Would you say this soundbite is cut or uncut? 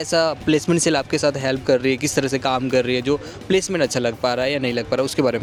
uncut